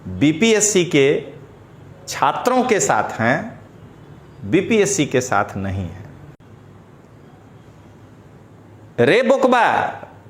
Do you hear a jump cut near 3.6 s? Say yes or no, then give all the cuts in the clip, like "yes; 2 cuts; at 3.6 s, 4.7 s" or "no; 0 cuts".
no; 1 cut; at 6.4 s